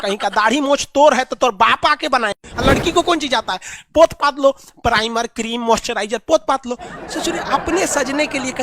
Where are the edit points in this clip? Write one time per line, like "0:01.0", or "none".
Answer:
0:02.4